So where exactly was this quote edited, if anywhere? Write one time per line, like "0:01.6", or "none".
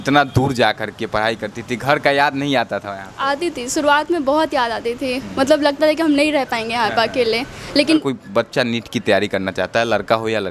0:08.0